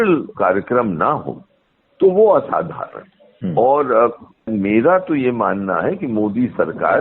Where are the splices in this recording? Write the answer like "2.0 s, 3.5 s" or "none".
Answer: none